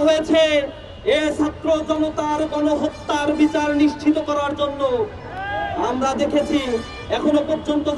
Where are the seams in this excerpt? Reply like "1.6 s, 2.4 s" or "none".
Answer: none